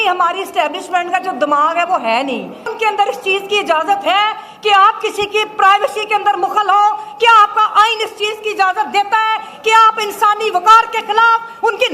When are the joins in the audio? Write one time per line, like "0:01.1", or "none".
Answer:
0:02.7